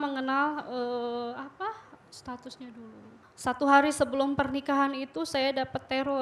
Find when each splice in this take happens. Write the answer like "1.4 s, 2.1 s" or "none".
none

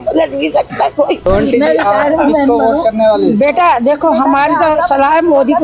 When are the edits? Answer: 1.2 s

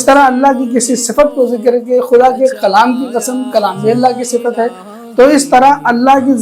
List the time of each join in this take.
none

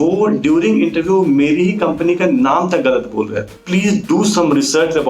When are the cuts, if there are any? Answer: 3.6 s

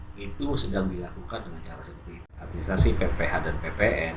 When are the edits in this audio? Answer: 2.5 s

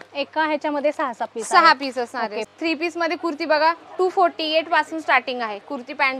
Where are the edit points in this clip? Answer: 2.5 s

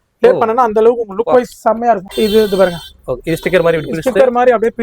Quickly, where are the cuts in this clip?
2.1 s

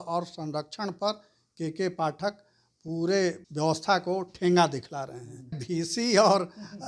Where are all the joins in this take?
3.4 s, 5.6 s

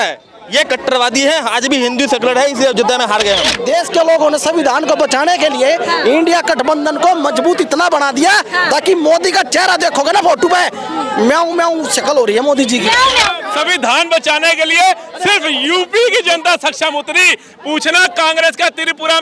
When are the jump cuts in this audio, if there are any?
3.6 s, 13.4 s

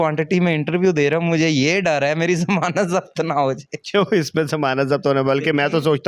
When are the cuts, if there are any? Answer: none

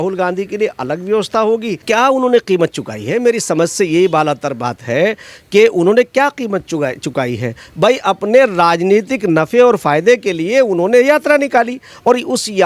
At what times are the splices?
1.8 s

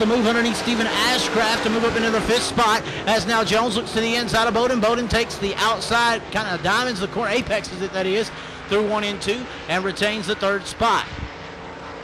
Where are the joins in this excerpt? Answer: none

